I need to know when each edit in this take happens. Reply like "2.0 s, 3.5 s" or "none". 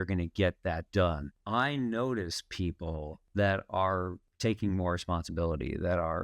1.3 s, 3.2 s, 4.2 s

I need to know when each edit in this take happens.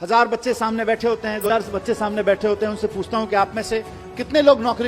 1.5 s

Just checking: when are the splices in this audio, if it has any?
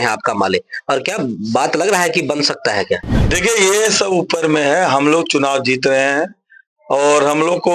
3.1 s

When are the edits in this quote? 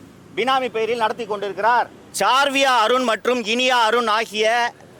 2.0 s

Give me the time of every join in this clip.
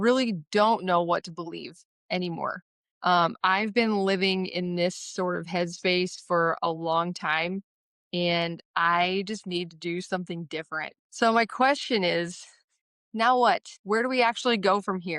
11.0 s, 13.7 s

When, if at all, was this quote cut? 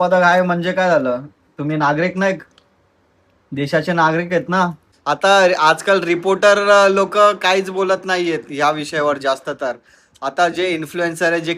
4.9 s

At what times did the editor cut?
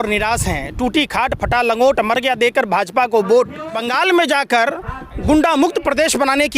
3.8 s

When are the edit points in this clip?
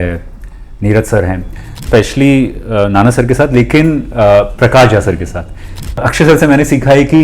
1.8 s, 6.1 s

